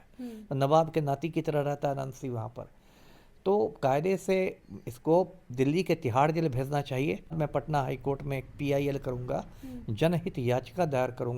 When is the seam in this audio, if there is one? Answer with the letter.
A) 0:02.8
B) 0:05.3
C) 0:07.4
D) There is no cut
C